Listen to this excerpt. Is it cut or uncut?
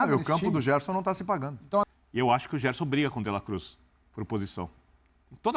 cut